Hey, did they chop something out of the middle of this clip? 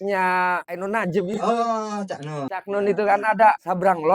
yes; 1 cut; at 1.3 s

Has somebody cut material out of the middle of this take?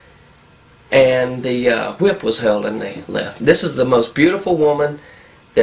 yes; 1 cut; at 1.6 s

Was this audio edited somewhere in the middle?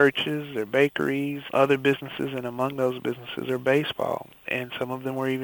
yes; 1 cut; at 1.4 s

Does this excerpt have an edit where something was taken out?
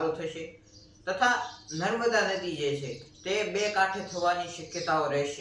no; 0 cuts

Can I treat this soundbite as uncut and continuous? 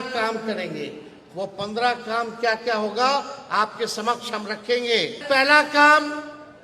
no; 1 cut; at 5.2 s

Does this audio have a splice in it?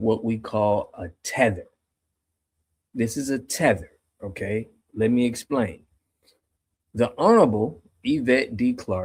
no; 0 cuts

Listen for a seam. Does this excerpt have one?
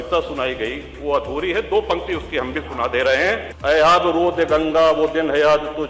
yes; 1 cut; at 3.5 s

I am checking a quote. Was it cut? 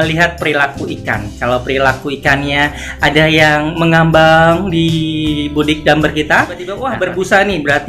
yes; 1 cut; at 6.9 s

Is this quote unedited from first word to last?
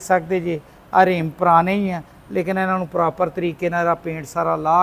yes; 0 cuts

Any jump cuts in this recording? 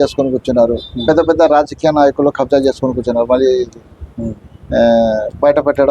no; 0 cuts

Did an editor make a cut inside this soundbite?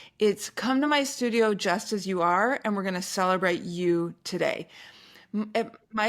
no; 0 cuts

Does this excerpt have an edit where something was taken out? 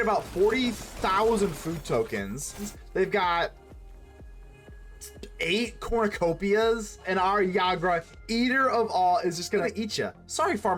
yes; 3 cuts; at 2.7 s, 7.1 s, 9.7 s

